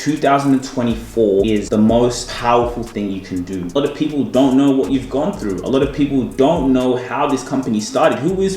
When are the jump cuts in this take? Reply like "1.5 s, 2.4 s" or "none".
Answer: 1.6 s, 2.3 s, 3.8 s

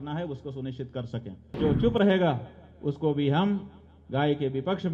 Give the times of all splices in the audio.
1.6 s

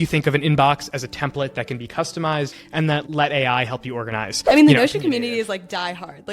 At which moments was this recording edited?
2.9 s, 4.3 s

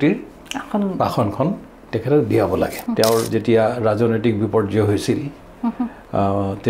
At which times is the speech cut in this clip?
2.8 s

